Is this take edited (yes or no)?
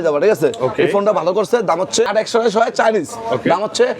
yes